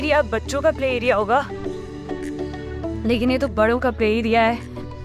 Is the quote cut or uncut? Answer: uncut